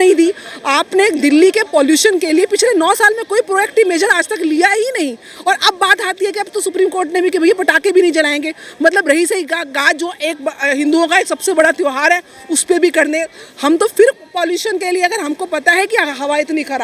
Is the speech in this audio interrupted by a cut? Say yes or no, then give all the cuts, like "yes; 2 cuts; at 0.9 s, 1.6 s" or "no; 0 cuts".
no; 0 cuts